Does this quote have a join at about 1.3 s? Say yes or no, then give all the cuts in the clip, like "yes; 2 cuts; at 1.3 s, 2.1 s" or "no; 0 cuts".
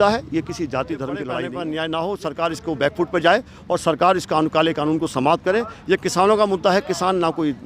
yes; 1 cut; at 1.3 s